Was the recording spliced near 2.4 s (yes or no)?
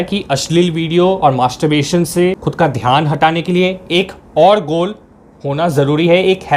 yes